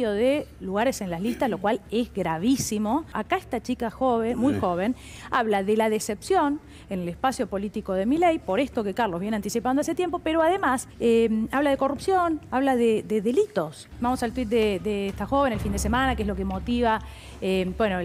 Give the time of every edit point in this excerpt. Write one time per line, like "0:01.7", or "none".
0:03.2
0:10.9
0:13.9

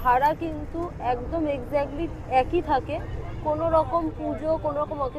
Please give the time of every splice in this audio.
none

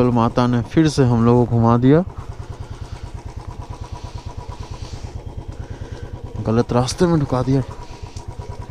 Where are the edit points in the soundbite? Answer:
none

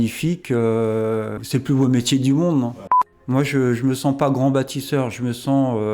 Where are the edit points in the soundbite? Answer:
0:01.4
0:03.3

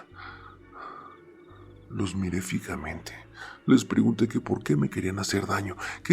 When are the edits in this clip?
0:01.9

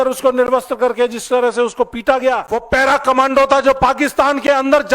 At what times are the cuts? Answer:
0:02.5

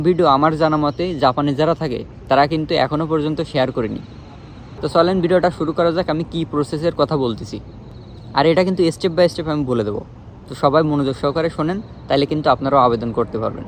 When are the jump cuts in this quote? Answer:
none

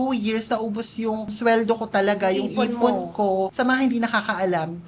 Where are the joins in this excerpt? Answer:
0:03.5

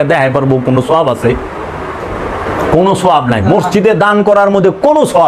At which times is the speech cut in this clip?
none

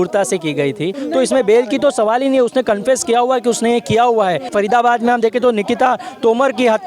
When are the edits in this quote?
0:01.0
0:04.5

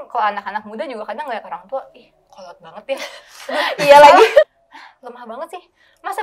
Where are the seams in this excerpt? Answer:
0:04.6

